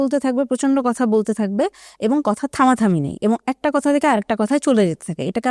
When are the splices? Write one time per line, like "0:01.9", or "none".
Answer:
none